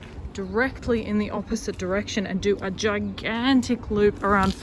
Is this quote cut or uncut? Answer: uncut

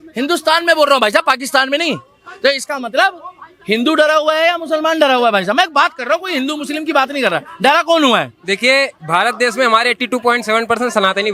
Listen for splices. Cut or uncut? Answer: uncut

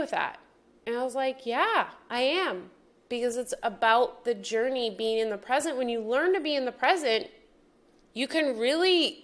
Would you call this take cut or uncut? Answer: cut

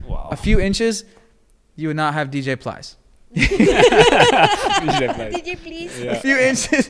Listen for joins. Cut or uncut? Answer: uncut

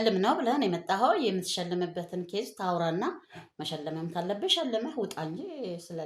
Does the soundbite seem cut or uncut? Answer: uncut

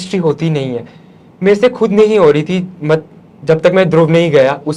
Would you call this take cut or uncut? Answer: uncut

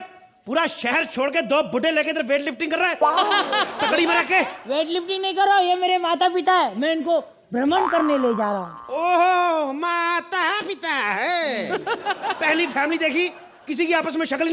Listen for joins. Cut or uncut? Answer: uncut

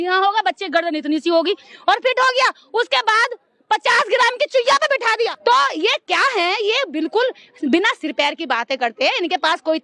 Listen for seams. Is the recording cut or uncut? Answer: uncut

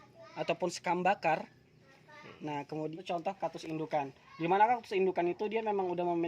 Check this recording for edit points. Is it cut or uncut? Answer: cut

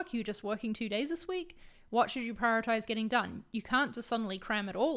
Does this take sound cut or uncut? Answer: uncut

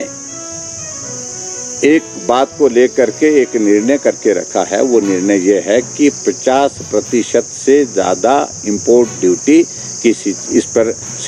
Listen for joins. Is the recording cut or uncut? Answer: uncut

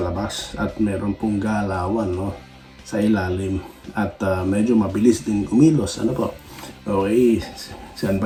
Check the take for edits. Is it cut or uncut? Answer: uncut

